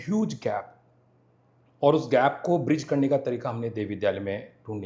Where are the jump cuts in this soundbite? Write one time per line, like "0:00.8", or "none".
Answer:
none